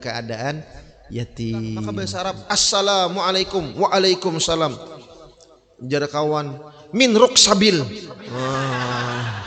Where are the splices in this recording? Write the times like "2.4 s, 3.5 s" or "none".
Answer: 2.4 s